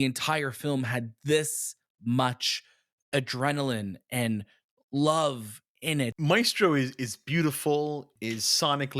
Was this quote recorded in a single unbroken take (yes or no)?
no